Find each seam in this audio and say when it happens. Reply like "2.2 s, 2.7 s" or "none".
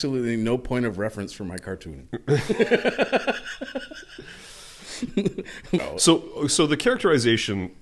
5.8 s